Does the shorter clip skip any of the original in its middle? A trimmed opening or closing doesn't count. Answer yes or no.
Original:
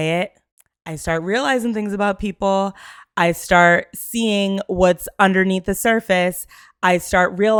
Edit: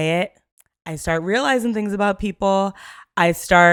no